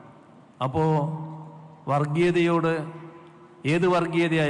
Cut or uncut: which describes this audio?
uncut